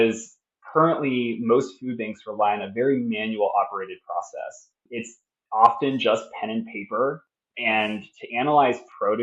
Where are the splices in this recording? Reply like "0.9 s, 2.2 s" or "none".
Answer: 4.9 s